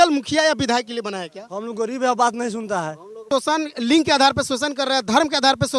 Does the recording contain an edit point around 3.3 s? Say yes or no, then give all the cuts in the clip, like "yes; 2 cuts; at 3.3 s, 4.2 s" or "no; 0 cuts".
yes; 1 cut; at 3.3 s